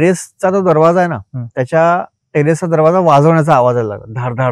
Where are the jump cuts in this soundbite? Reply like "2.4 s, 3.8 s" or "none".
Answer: none